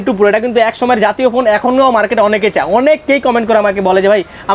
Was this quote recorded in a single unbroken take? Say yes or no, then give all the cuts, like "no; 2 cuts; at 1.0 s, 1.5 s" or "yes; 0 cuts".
yes; 0 cuts